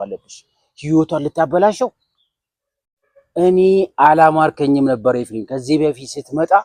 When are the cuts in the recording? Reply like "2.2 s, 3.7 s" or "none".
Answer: none